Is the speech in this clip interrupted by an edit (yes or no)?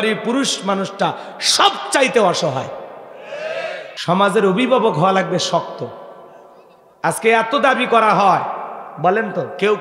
yes